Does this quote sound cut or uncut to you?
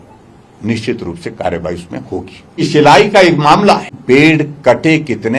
cut